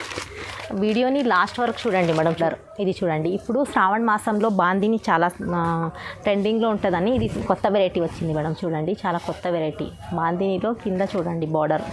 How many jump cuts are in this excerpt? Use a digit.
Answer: 1